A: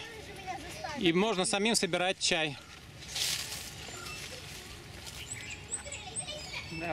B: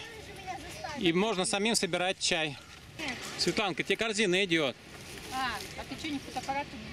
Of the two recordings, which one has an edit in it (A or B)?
B